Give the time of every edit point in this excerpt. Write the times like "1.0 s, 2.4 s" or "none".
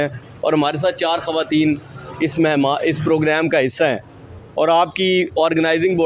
none